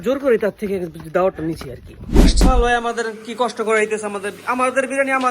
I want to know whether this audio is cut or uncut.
cut